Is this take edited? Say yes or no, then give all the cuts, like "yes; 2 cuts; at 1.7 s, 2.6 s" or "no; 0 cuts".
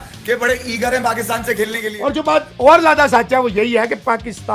yes; 1 cut; at 1.9 s